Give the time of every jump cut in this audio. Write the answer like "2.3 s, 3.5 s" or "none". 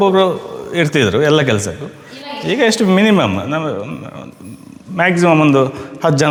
none